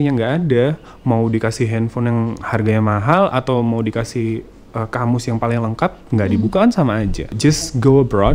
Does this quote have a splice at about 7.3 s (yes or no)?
yes